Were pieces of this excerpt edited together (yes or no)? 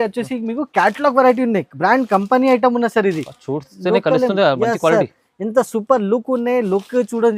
no